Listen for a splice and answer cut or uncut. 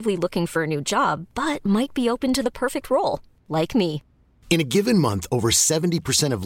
uncut